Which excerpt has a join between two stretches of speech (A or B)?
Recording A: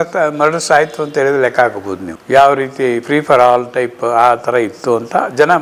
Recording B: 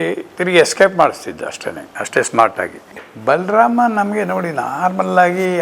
B